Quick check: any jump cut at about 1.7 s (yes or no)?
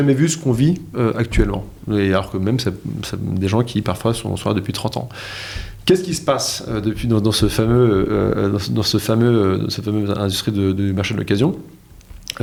no